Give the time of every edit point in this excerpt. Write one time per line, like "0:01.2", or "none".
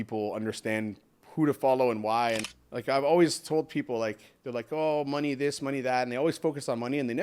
0:02.5